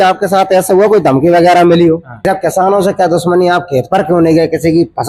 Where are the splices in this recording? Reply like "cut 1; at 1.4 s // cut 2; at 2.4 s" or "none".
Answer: cut 1; at 2.2 s